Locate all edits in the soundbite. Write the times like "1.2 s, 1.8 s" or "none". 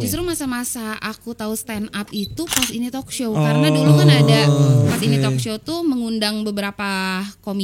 none